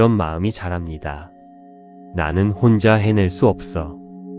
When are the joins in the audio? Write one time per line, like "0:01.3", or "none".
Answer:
0:01.5